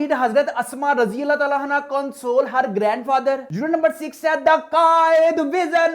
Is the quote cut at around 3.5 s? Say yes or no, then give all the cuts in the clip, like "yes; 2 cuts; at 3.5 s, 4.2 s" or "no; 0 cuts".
yes; 1 cut; at 3.5 s